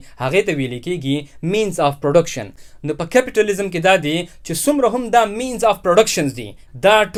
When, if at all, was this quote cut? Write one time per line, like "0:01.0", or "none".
none